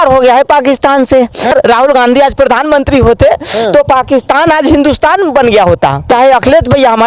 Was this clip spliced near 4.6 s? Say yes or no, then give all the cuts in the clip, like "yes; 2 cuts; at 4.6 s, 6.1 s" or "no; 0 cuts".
no; 2 cuts; at 1.5 s, 6.1 s